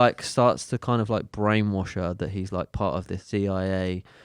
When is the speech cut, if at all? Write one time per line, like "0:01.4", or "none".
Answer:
0:03.2